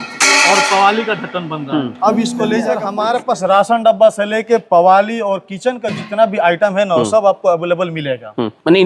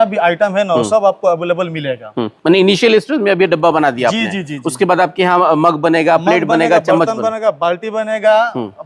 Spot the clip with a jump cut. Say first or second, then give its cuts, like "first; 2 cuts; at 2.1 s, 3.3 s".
first; 1 cut; at 2.9 s